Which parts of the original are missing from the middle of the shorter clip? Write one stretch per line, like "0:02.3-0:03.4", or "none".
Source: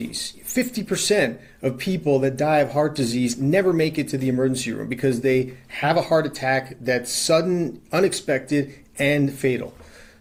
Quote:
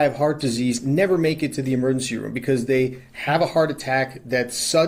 none